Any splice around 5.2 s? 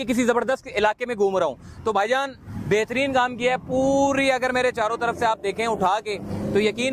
no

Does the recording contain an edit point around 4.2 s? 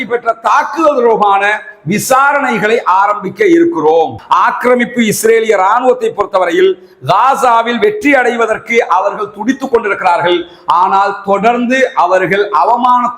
yes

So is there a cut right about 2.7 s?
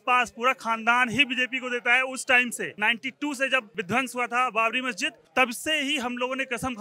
yes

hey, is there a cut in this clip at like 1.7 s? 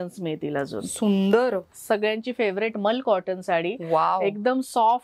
yes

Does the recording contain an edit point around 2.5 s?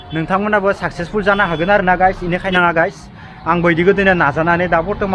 yes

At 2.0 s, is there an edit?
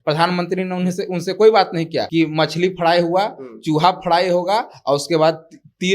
yes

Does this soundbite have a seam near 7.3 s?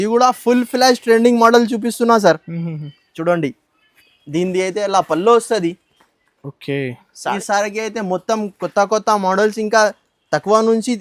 yes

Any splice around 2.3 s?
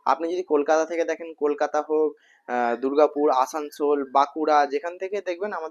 no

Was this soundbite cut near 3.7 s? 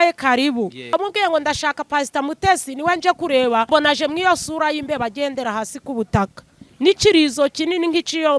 yes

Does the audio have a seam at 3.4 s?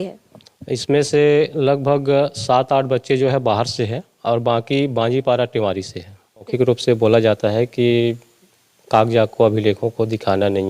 no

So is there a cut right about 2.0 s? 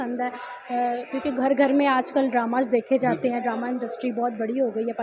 no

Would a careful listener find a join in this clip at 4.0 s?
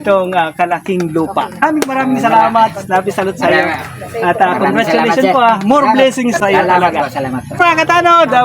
no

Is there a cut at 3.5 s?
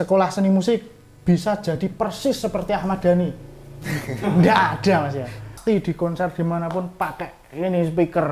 no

